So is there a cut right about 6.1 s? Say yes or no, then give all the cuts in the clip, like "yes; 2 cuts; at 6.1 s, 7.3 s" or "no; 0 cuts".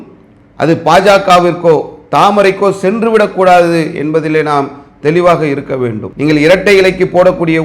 yes; 1 cut; at 6.1 s